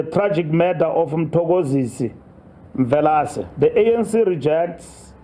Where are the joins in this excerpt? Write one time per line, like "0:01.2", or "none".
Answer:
0:03.4